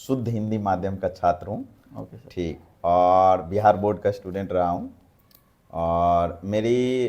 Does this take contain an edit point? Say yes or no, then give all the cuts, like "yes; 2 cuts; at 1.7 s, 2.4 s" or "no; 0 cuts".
no; 0 cuts